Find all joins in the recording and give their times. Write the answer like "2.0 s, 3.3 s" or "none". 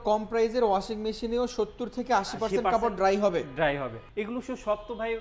4.0 s